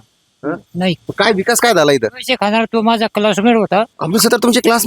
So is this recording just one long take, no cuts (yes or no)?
no